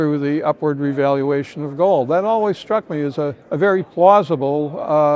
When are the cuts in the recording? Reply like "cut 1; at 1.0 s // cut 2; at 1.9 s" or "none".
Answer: cut 1; at 3.7 s

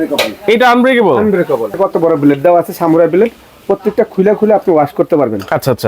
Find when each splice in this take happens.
cut 1; at 1.7 s

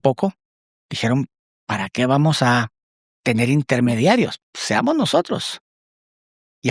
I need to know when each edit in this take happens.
cut 1; at 4.4 s

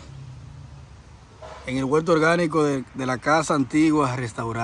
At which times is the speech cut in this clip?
none

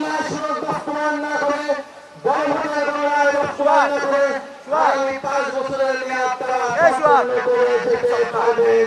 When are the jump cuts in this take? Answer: none

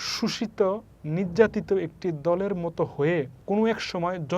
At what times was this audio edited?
cut 1; at 3.4 s

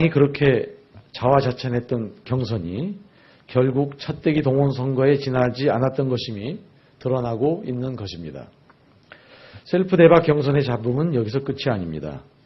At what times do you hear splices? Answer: cut 1; at 5.7 s

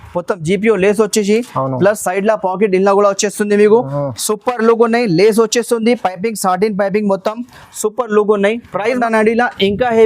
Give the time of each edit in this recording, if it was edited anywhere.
cut 1; at 9.0 s

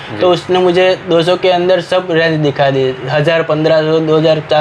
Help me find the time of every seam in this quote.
none

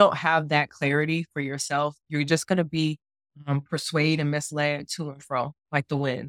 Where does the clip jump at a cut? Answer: none

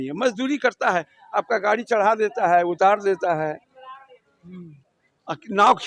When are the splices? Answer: none

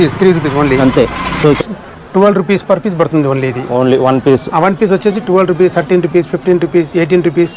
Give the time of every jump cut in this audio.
cut 1; at 1.6 s

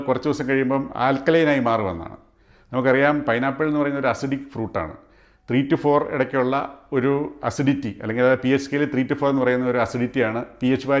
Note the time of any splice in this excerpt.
none

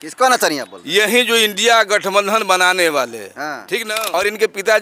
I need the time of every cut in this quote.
cut 1; at 3.8 s

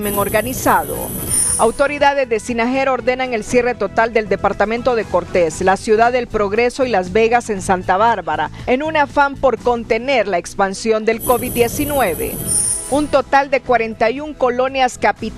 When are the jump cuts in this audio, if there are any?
cut 1; at 1.1 s // cut 2; at 12.5 s

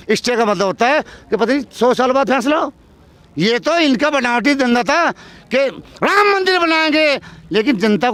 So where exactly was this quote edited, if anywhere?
none

